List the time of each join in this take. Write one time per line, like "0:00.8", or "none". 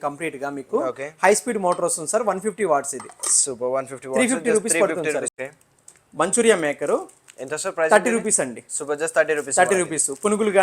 0:05.3